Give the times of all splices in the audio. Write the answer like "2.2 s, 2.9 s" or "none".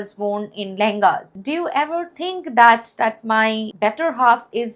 1.3 s, 3.7 s